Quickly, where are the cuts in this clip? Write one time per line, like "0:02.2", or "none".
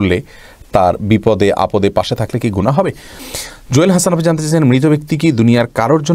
0:03.1